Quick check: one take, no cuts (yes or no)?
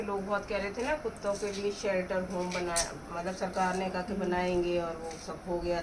yes